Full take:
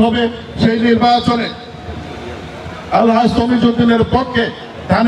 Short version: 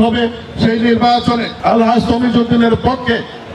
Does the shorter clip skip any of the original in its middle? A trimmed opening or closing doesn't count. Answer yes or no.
yes